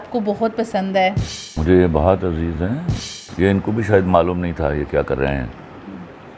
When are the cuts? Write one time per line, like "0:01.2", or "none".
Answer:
0:01.4
0:02.9